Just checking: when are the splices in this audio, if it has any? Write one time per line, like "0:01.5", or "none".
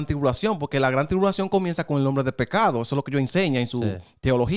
none

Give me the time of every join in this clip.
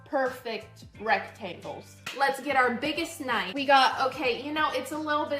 0:02.0
0:03.5

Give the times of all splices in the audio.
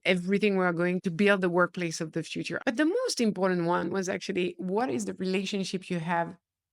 0:01.0
0:02.4

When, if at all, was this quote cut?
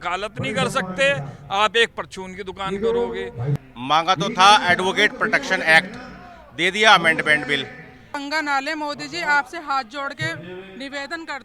0:03.5
0:08.2

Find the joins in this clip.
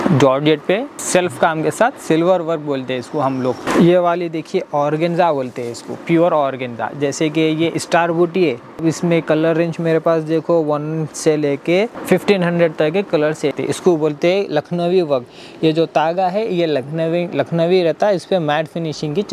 0:00.9
0:03.6
0:08.8
0:12.0
0:13.5

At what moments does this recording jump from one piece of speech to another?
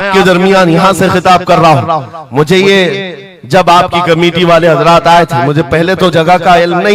none

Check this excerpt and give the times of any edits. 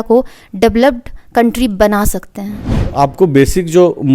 0:02.8

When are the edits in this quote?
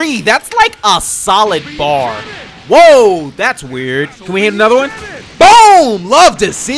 0:02.3

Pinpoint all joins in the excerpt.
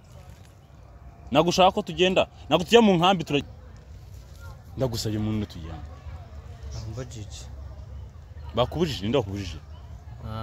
0:03.4

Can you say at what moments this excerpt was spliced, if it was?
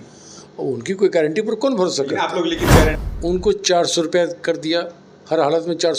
0:03.0

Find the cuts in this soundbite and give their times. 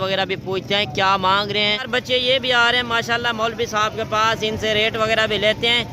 0:01.8

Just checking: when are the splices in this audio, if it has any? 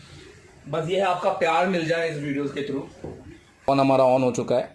0:03.5

